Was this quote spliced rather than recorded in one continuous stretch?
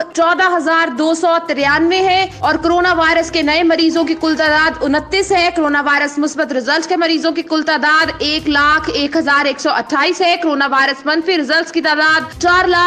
no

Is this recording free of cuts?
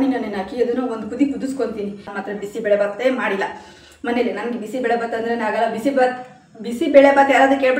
no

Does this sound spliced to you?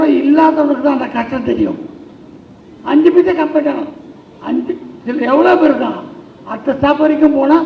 no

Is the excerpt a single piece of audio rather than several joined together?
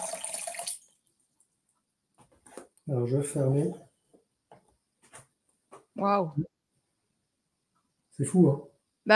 yes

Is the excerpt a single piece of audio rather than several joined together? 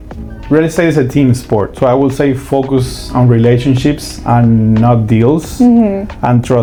yes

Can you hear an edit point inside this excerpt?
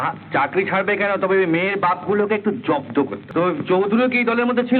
yes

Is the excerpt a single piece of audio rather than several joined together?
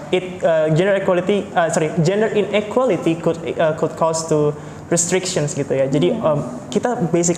yes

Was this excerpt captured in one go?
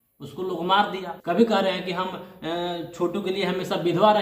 no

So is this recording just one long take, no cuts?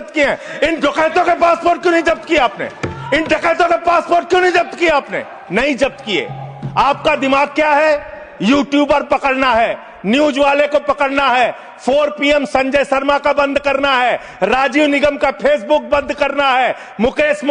yes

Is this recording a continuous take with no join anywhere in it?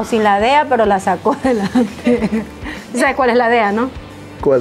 yes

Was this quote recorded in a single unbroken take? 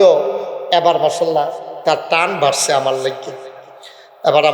yes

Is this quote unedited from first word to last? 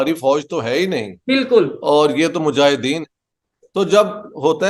yes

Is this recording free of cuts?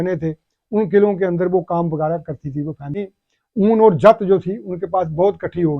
no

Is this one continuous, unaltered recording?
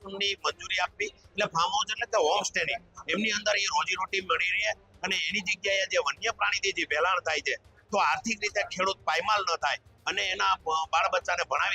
yes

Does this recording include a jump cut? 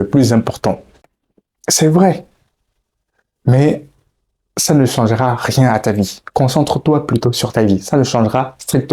yes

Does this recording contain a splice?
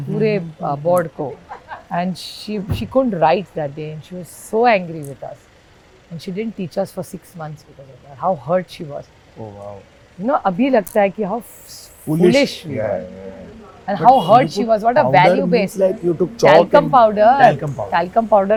no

